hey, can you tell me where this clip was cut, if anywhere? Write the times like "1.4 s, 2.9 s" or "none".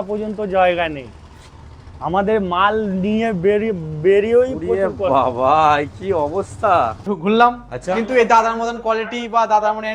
7.0 s